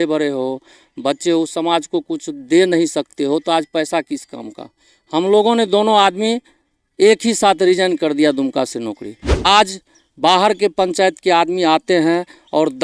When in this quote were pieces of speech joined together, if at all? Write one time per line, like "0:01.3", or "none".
0:09.4